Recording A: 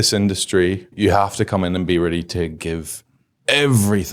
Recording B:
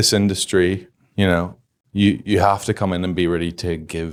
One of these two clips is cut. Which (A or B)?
A